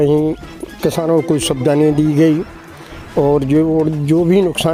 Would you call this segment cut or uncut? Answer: uncut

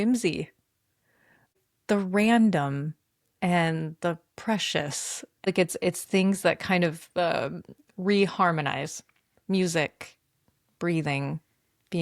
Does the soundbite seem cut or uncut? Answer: cut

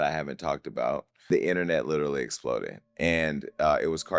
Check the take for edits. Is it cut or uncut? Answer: cut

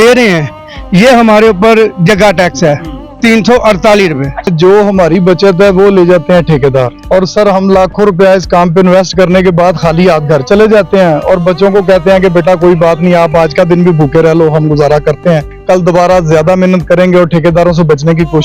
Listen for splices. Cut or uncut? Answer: cut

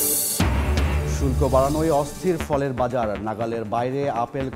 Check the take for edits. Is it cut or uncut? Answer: uncut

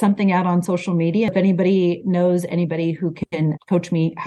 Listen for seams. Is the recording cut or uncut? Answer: cut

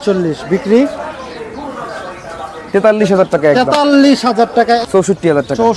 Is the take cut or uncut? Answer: cut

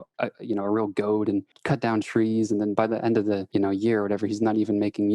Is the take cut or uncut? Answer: cut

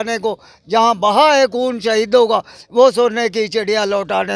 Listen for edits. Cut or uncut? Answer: uncut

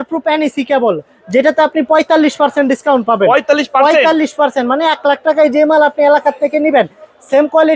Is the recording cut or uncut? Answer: uncut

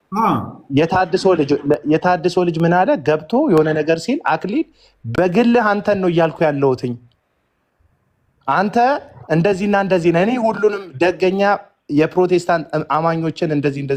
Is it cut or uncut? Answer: uncut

